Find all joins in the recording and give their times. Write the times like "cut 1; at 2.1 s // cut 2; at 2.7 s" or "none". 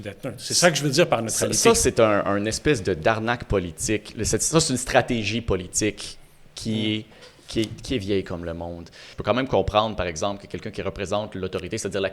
cut 1; at 9.1 s